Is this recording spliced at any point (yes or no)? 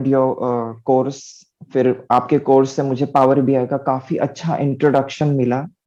no